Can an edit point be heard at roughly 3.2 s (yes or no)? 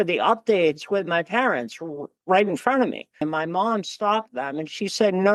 yes